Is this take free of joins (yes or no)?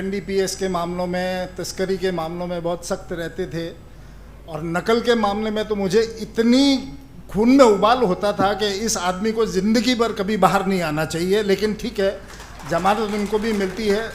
yes